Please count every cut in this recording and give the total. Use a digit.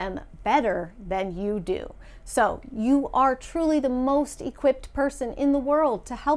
0